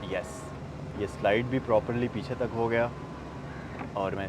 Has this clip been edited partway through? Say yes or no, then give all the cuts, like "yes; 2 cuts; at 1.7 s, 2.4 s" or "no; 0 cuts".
no; 0 cuts